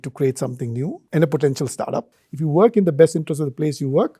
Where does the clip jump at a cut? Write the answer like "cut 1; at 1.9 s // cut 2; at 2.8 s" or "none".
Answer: cut 1; at 1.0 s // cut 2; at 2.1 s

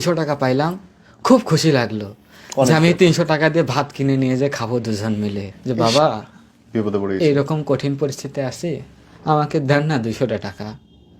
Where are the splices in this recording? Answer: cut 1; at 5.5 s

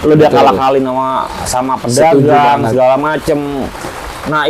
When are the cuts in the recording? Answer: none

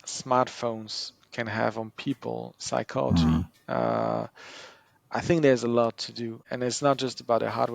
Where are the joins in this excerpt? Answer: cut 1; at 6.4 s

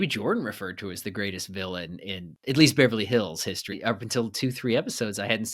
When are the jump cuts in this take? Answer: cut 1; at 2.3 s // cut 2; at 3.8 s

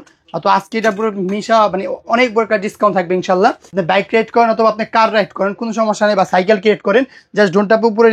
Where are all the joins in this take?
cut 1; at 3.6 s

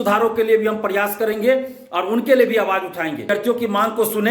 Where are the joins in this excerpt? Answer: cut 1; at 3.3 s

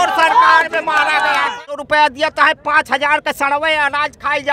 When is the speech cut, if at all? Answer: cut 1; at 1.7 s

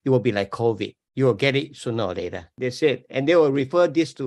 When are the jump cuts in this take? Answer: cut 1; at 2.5 s

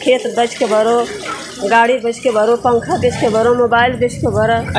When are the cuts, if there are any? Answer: none

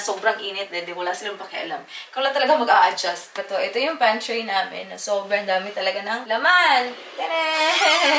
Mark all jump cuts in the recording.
cut 1; at 3.4 s // cut 2; at 6.2 s

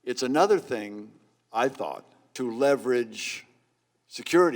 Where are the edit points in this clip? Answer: cut 1; at 2.2 s

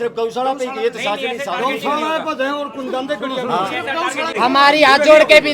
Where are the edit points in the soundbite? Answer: cut 1; at 4.3 s

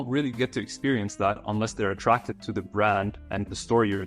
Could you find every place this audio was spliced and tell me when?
none

